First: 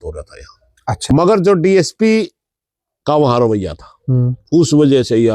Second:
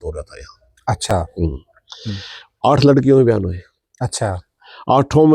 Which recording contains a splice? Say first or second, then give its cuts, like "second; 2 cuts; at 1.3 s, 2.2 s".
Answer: first; 1 cut; at 1.0 s